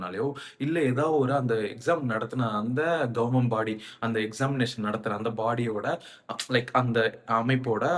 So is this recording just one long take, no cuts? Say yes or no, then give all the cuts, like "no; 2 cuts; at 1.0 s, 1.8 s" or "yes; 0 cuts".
yes; 0 cuts